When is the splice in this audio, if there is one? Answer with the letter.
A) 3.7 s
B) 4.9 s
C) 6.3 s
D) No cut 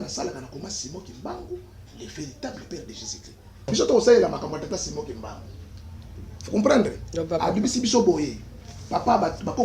A